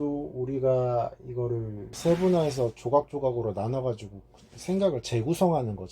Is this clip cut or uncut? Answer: cut